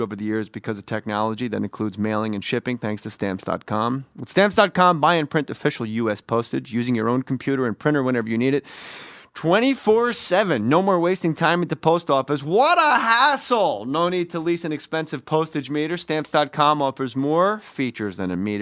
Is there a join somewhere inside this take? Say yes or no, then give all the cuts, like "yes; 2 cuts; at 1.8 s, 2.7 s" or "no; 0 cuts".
no; 0 cuts